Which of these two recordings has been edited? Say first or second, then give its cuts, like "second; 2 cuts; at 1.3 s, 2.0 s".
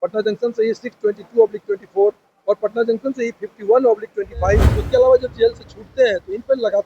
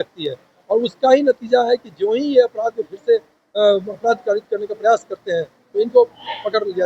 first; 1 cut; at 4.7 s